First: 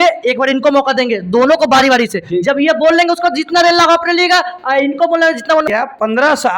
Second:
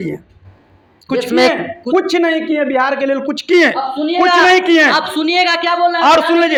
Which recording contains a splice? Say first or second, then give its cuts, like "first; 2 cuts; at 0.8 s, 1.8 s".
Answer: first; 1 cut; at 5.7 s